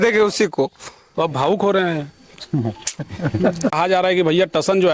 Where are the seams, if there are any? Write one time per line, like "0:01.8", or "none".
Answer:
0:03.7